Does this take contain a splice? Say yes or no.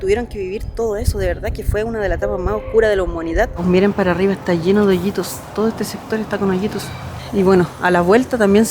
yes